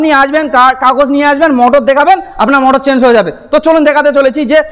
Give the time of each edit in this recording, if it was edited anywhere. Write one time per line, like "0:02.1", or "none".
none